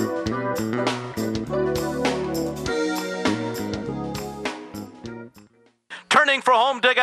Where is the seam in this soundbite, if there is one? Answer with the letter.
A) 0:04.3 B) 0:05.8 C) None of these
B